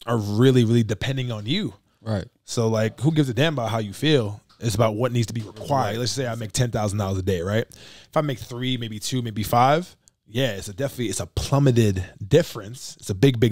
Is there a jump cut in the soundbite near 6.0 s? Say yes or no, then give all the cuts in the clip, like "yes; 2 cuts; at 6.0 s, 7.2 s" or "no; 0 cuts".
yes; 1 cut; at 6.0 s